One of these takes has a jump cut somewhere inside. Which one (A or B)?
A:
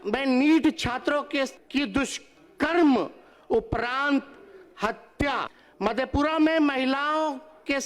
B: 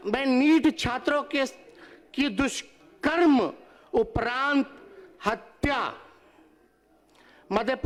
A